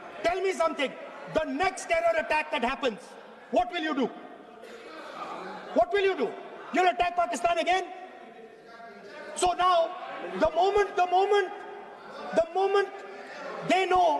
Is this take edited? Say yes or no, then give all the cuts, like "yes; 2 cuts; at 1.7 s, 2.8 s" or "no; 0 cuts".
no; 0 cuts